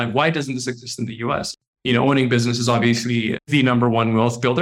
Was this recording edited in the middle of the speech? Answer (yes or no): yes